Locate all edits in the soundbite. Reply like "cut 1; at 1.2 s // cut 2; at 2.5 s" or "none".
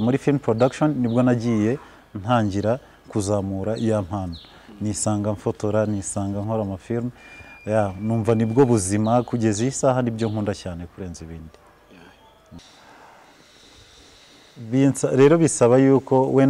cut 1; at 12.6 s